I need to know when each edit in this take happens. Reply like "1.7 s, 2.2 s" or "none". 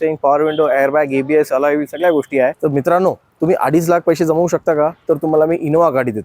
2.6 s

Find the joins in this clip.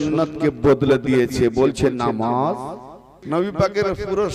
3.1 s

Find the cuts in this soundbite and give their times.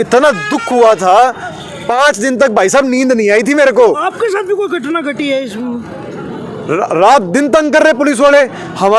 none

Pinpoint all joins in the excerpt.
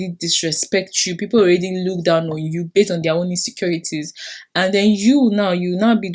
none

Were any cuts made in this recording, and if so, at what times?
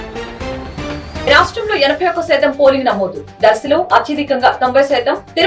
1.3 s

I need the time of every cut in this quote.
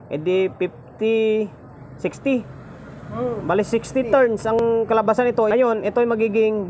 4.6 s, 5.5 s

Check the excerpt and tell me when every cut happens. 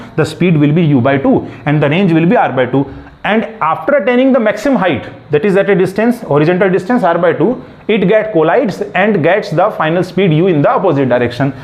none

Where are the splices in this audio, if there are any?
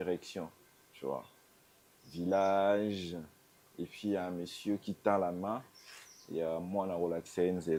none

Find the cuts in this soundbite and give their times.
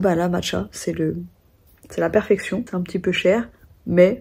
2.7 s

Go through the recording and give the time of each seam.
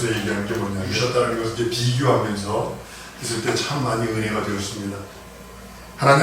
0.9 s

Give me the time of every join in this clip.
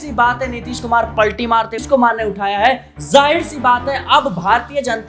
1.8 s

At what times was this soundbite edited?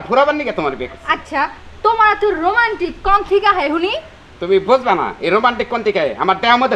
none

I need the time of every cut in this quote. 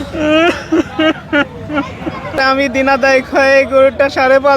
2.4 s

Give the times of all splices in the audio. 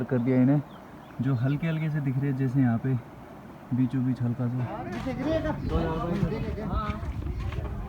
4.8 s

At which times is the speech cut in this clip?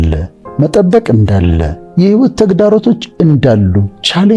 none

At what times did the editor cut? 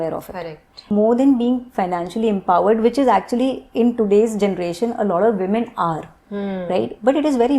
0.9 s

